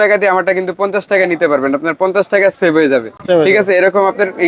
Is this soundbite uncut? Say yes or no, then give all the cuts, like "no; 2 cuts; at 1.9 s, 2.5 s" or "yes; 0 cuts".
yes; 0 cuts